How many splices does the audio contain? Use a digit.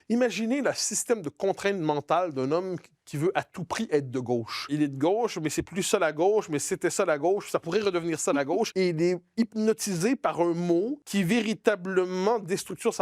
3